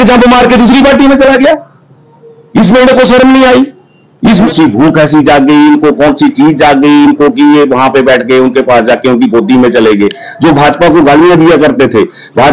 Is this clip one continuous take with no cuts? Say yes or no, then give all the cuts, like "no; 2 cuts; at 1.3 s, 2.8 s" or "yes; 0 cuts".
no; 1 cut; at 4.5 s